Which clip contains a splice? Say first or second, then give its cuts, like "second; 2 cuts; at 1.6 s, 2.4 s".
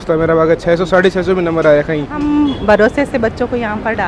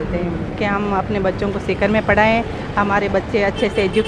first; 1 cut; at 2.2 s